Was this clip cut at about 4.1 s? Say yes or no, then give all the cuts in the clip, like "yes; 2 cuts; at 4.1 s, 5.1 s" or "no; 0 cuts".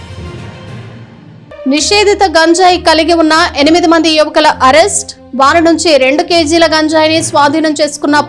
no; 1 cut; at 1.0 s